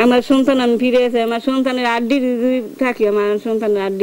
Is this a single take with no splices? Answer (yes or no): yes